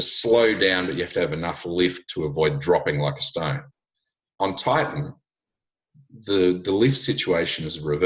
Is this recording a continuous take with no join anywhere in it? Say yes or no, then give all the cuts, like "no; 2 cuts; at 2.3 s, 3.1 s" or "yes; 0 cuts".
no; 1 cut; at 3.7 s